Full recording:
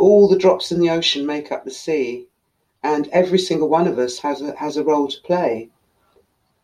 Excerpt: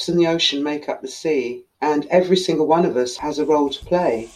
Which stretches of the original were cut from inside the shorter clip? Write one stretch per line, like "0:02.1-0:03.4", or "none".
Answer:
0:02.3-0:02.7
0:04.2-0:04.5